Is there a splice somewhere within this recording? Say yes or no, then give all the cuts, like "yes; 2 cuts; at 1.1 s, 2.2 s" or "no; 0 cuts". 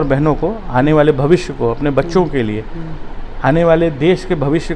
no; 0 cuts